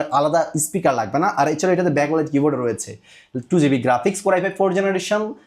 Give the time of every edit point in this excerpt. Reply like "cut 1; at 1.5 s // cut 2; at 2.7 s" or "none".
none